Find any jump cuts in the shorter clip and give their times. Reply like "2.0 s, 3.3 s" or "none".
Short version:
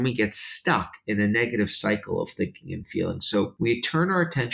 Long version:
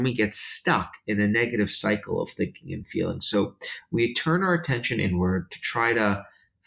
3.5 s